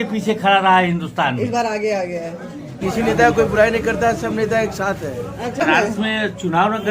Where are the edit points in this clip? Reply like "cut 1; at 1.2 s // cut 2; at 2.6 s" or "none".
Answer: cut 1; at 2.8 s // cut 2; at 5.6 s

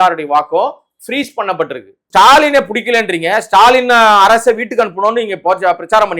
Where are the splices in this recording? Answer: cut 1; at 2.0 s

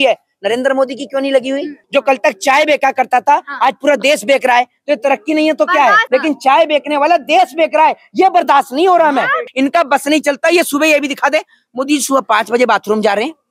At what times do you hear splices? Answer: cut 1; at 1.8 s // cut 2; at 6.0 s // cut 3; at 9.5 s

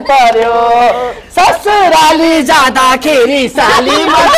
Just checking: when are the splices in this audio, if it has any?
none

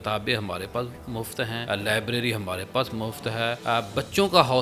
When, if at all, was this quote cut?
cut 1; at 1.6 s // cut 2; at 3.6 s

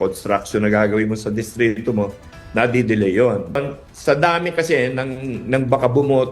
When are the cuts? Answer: cut 1; at 3.6 s

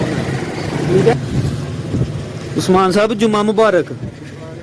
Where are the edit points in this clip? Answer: cut 1; at 1.1 s

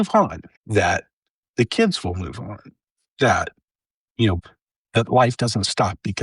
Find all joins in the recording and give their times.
cut 1; at 4.4 s

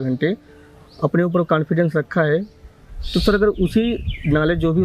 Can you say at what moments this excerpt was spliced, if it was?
none

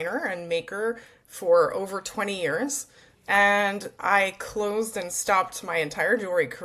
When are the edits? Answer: none

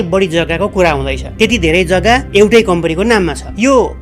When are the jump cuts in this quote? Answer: none

